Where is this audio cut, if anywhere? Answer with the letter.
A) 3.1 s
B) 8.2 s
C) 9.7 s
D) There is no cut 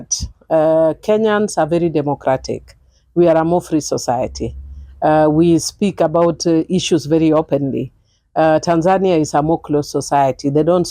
D